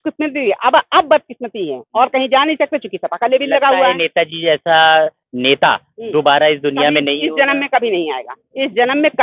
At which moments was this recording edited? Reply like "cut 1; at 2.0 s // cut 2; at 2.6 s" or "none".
none